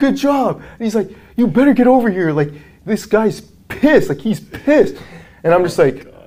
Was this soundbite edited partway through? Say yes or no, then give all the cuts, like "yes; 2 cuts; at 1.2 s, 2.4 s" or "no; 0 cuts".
no; 0 cuts